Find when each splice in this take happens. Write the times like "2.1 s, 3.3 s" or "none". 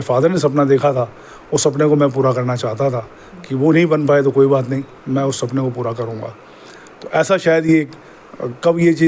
none